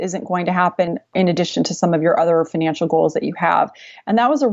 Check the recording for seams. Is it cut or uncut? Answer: cut